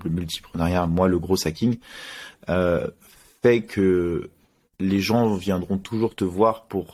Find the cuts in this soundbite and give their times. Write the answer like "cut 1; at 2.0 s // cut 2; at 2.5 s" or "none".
none